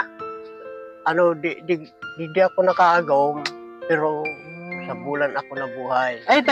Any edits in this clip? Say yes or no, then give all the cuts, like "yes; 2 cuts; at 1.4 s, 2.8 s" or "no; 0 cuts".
no; 0 cuts